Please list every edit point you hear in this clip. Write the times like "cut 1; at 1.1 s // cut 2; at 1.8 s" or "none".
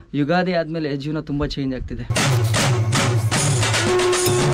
cut 1; at 2.1 s